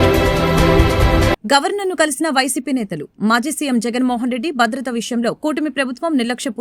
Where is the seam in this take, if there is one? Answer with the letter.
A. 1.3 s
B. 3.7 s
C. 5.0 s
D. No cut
D